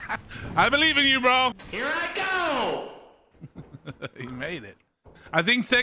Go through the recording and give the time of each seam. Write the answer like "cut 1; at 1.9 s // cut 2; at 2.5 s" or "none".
cut 1; at 1.6 s